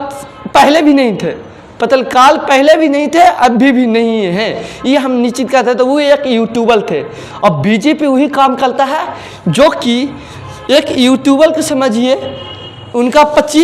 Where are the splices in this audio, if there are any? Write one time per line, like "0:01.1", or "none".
none